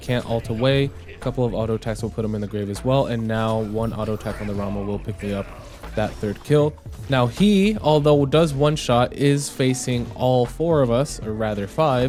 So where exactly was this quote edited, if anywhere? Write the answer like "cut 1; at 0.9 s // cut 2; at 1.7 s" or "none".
none